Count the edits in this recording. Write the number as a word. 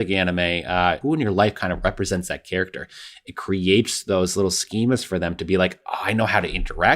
one